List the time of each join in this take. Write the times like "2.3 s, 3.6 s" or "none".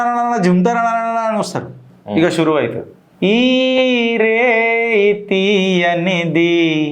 1.8 s

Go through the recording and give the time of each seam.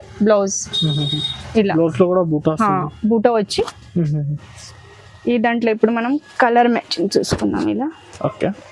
none

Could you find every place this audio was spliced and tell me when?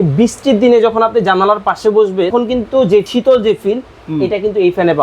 2.3 s, 3.1 s

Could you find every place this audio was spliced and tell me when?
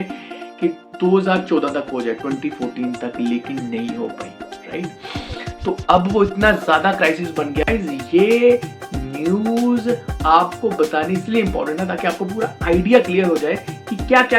7.7 s

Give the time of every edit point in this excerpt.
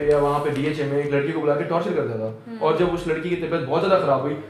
none

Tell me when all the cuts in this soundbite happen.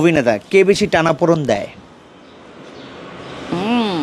none

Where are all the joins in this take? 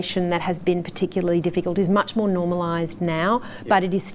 none

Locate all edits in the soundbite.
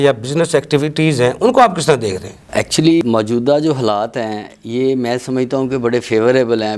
none

